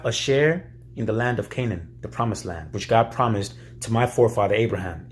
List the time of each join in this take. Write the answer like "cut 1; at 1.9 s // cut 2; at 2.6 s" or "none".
none